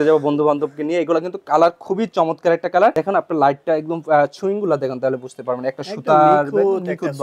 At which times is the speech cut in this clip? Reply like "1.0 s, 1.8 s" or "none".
none